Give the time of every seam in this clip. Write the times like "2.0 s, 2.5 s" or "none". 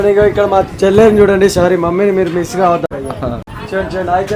2.9 s